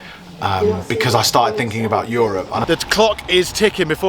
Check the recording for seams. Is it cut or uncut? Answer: cut